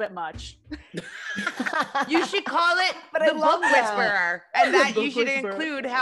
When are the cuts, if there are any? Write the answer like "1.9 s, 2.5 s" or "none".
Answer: none